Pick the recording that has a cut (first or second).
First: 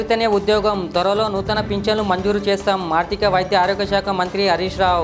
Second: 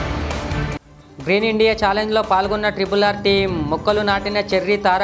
second